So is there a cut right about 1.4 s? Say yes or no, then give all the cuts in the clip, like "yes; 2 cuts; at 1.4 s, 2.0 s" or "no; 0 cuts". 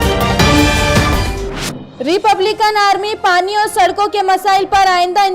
yes; 1 cut; at 1.4 s